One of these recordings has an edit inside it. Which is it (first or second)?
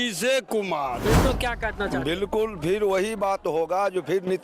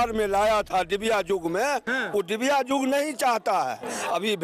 first